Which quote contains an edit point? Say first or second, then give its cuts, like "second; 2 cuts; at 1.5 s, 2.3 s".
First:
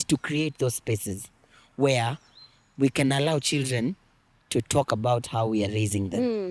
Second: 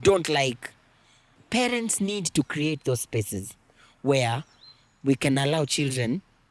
second; 1 cut; at 1.3 s